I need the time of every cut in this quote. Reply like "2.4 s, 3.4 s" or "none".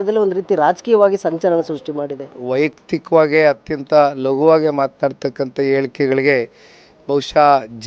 2.4 s